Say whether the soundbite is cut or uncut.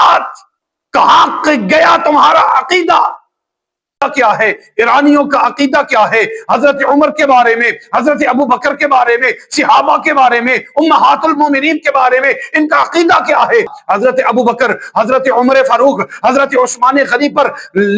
cut